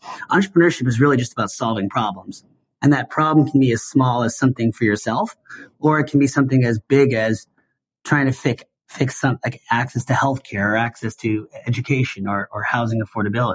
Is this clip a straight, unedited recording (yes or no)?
yes